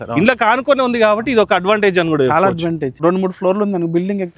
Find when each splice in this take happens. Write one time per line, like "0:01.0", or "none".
0:03.0